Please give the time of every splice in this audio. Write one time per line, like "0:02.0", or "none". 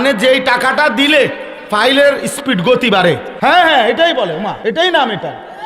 0:03.3
0:04.6